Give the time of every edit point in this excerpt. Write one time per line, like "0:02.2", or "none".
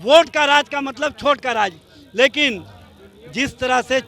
none